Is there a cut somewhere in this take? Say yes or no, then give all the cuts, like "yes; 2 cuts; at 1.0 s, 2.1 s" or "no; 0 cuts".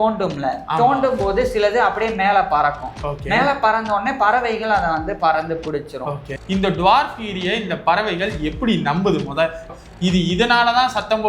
yes; 2 cuts; at 6.3 s, 9.7 s